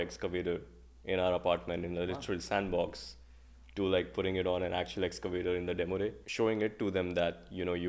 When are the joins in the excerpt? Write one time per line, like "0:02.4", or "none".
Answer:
0:06.2